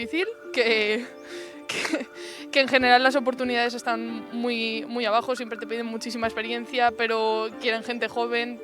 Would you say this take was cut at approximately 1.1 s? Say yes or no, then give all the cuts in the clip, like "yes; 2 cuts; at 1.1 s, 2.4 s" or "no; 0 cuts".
no; 0 cuts